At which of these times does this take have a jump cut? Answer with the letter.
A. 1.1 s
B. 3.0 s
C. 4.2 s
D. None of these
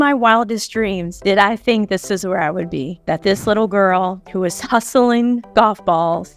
A